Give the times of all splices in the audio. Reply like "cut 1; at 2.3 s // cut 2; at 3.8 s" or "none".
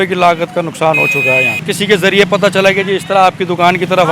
cut 1; at 1.7 s

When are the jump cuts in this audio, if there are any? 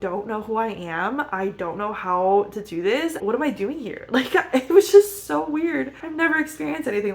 cut 1; at 3.2 s // cut 2; at 6.0 s

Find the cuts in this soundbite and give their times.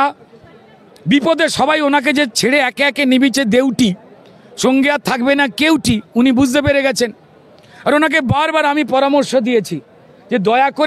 none

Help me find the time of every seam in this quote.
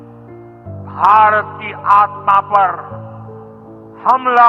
cut 1; at 0.9 s

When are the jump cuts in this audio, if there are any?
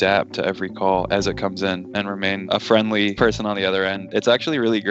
cut 1; at 1.9 s // cut 2; at 4.0 s

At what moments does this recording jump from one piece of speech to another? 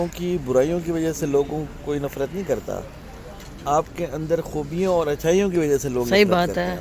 none

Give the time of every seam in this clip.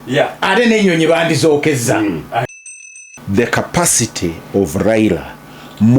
cut 1; at 2.9 s

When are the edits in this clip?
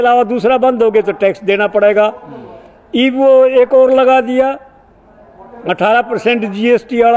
none

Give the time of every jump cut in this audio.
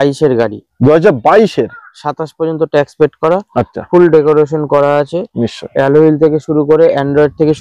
none

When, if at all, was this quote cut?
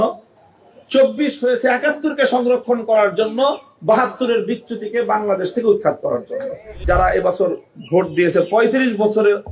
cut 1; at 6.7 s

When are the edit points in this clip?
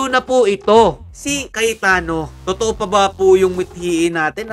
cut 1; at 1.5 s // cut 2; at 2.3 s

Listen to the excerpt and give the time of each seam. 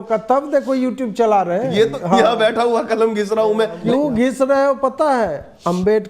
cut 1; at 2.0 s // cut 2; at 3.8 s

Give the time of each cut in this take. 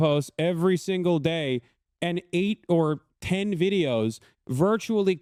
none

